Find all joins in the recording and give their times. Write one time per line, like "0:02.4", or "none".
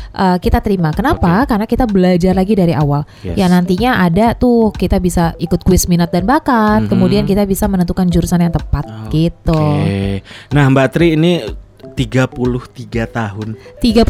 none

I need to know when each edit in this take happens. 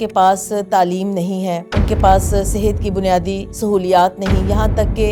none

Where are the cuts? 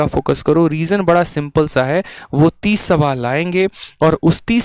none

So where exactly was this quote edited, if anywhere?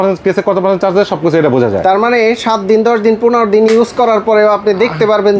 none

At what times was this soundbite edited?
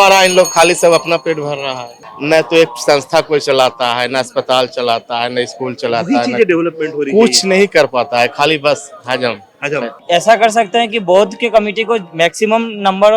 0:01.8
0:09.9

